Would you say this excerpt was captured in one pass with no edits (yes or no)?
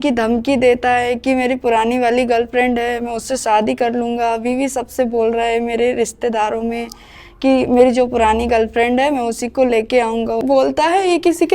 no